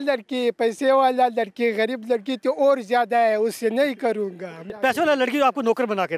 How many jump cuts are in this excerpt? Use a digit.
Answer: 1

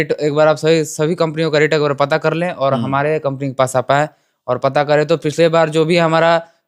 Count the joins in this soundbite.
0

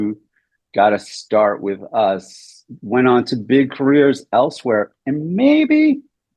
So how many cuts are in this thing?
0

